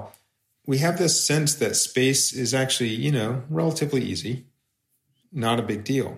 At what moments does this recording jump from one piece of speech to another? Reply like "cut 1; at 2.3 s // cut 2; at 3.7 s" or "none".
cut 1; at 5.1 s